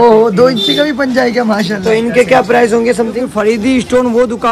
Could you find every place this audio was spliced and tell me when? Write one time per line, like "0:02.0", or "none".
0:01.8
0:03.3

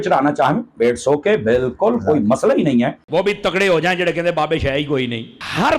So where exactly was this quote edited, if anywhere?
0:03.0

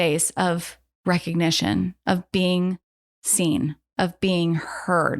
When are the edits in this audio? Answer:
none

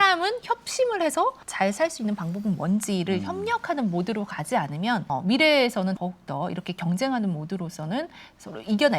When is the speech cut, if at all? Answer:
0:01.4
0:05.1
0:06.0

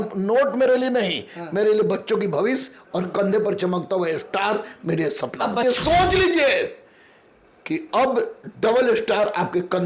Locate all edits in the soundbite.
0:05.6

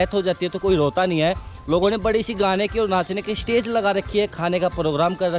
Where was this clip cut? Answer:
none

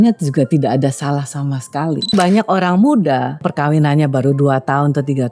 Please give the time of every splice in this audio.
0:02.1
0:03.5

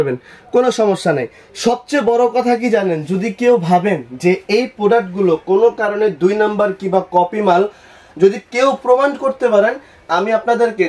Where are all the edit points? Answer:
none

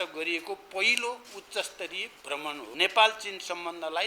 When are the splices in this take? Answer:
0:02.7

